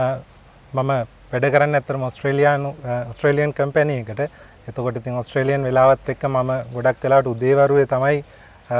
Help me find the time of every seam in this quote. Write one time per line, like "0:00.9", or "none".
none

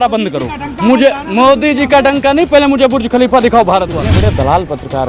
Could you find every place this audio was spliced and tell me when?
0:04.0

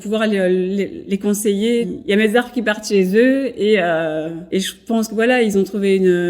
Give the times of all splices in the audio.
0:01.0
0:01.9
0:04.4

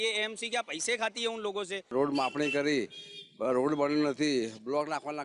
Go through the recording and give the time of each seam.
0:01.9

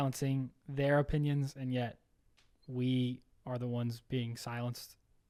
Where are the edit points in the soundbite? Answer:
none

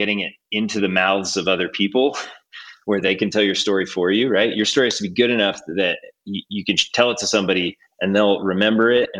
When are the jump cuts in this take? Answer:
none

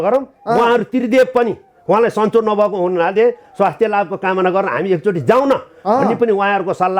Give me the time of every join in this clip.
none

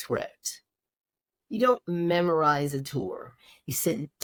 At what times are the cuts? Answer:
none

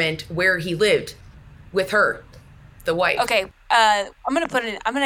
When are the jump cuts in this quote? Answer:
none

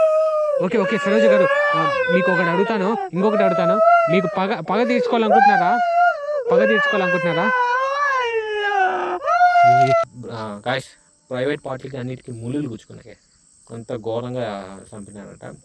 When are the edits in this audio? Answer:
0:10.1

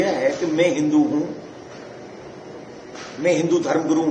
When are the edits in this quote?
none

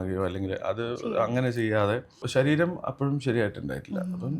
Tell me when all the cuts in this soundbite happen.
0:02.2

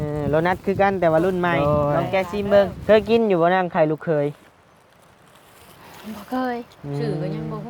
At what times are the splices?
0:02.8

